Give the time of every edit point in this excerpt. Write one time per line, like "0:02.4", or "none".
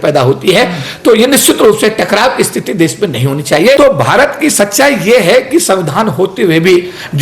0:03.8